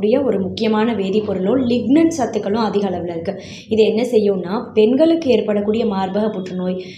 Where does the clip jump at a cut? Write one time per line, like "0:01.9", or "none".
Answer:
none